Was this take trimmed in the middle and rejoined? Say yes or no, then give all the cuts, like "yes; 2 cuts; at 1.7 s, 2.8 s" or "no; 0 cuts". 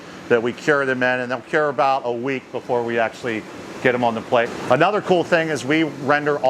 yes; 1 cut; at 4.5 s